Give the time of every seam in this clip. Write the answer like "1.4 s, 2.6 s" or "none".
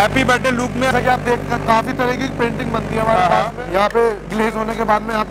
0.9 s, 3.6 s